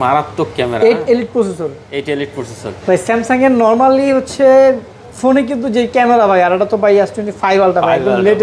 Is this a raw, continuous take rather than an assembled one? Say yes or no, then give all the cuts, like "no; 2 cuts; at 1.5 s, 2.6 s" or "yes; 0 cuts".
yes; 0 cuts